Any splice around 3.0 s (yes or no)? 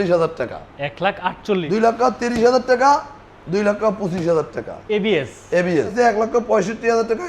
no